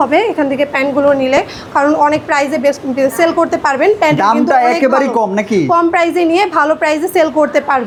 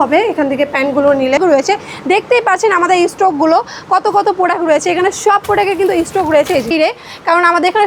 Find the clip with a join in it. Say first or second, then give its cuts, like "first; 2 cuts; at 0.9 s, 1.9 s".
second; 2 cuts; at 1.4 s, 6.7 s